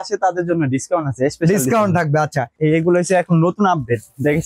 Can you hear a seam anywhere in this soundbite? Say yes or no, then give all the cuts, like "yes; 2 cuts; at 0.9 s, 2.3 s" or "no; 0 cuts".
yes; 1 cut; at 2.5 s